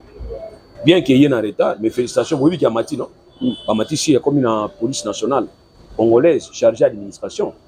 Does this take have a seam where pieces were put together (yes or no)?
no